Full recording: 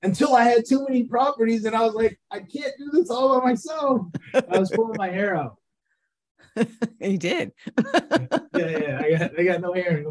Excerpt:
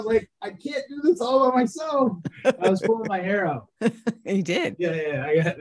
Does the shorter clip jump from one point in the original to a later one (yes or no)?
yes